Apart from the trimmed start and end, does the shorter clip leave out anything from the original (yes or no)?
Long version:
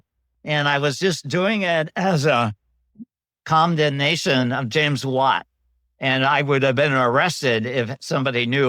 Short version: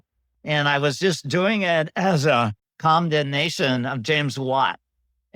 yes